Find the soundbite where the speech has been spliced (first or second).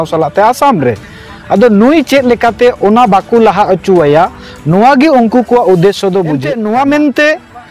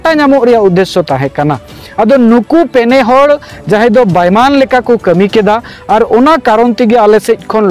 first